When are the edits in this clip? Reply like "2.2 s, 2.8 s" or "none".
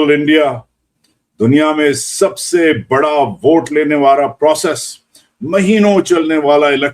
0.9 s